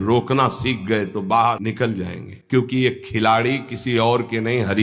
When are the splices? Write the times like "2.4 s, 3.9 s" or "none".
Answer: 2.2 s